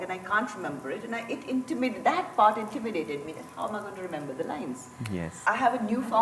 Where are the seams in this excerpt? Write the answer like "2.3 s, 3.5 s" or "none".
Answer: 5.3 s